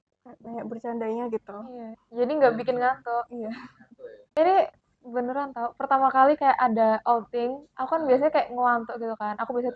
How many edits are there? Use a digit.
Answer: 1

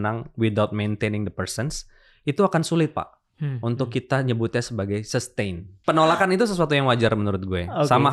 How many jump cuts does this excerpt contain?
1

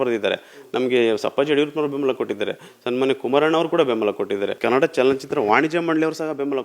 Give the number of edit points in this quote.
1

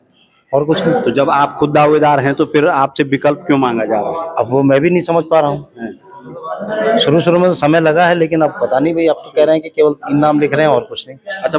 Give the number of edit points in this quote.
0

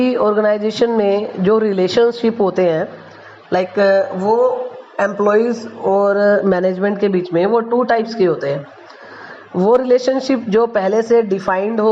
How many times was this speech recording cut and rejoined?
1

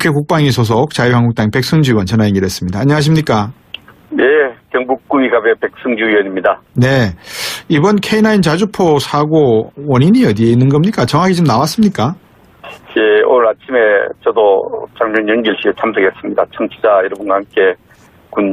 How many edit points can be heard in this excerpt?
1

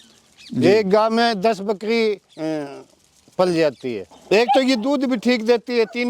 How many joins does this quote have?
1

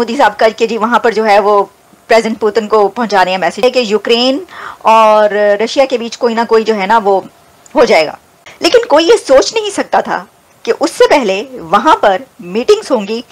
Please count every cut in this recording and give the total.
1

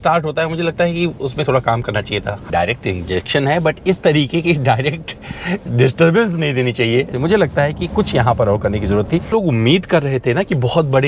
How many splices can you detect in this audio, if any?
3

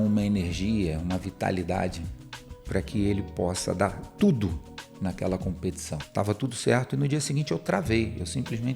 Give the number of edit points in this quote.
1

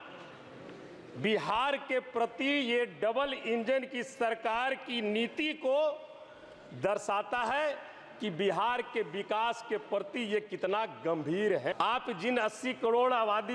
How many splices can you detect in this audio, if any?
1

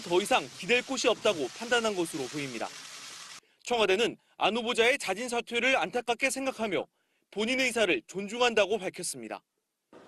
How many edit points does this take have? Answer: 1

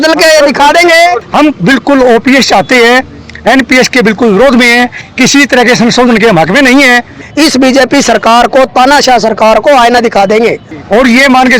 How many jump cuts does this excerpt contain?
3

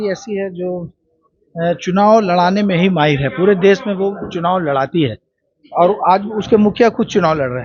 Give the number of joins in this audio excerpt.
0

